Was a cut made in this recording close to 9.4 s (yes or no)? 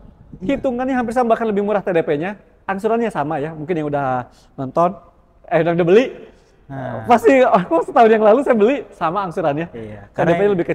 no